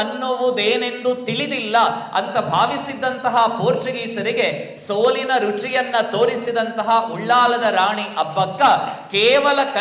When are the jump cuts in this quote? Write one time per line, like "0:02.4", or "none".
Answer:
none